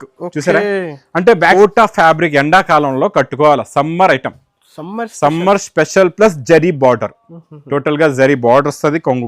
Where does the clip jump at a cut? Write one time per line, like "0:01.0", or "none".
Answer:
0:01.5